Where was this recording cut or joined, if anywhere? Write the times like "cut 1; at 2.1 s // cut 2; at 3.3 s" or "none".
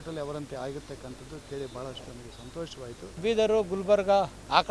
cut 1; at 3.2 s

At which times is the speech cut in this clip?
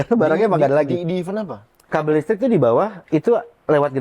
cut 1; at 1.8 s // cut 2; at 3.0 s

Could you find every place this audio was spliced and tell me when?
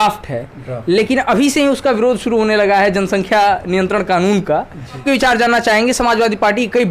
cut 1; at 5.0 s

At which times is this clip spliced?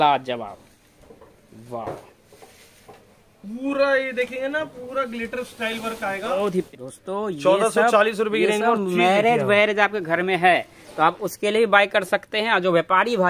cut 1; at 6.7 s

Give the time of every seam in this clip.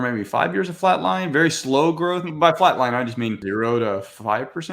cut 1; at 3.4 s

